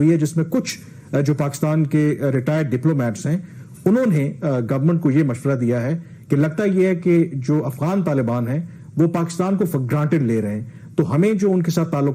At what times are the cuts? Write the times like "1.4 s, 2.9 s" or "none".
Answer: none